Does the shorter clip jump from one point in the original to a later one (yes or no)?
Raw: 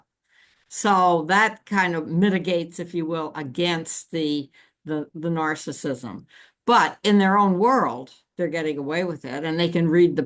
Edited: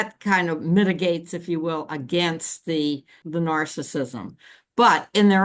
yes